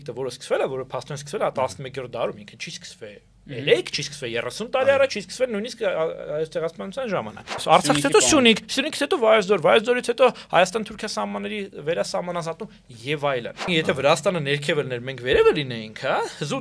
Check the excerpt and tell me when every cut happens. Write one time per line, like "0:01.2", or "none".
0:07.6
0:13.6